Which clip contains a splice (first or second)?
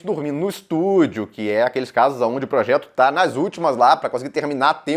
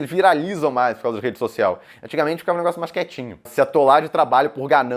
second